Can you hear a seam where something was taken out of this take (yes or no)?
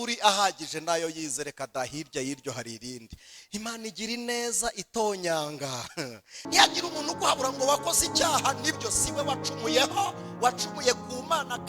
yes